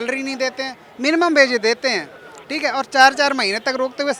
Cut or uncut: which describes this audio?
uncut